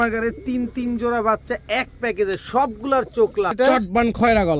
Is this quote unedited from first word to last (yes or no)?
no